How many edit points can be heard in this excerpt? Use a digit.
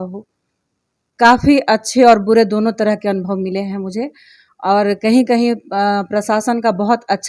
1